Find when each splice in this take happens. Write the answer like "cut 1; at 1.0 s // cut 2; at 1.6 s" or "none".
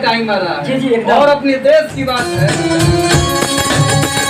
cut 1; at 2.3 s